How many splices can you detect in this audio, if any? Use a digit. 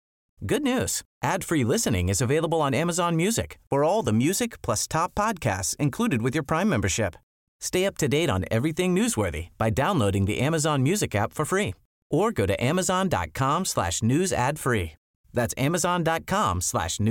0